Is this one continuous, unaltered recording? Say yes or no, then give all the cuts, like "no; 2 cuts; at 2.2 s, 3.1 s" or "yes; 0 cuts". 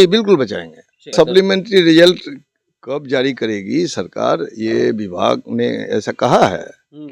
no; 1 cut; at 1.1 s